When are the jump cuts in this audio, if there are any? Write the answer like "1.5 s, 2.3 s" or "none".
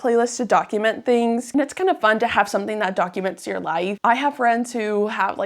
1.4 s, 4.0 s